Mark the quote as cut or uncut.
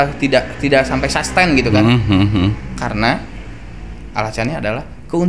uncut